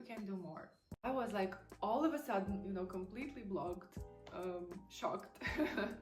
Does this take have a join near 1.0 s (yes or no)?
yes